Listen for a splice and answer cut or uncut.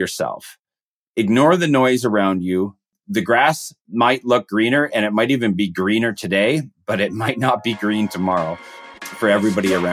cut